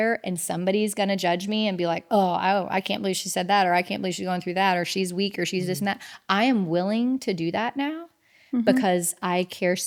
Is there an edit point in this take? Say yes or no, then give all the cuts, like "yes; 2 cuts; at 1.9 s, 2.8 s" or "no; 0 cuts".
no; 0 cuts